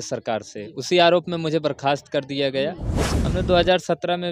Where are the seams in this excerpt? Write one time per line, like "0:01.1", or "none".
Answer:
0:03.0